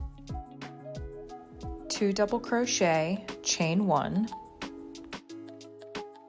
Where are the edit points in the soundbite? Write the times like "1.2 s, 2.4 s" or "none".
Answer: 2.0 s, 4.8 s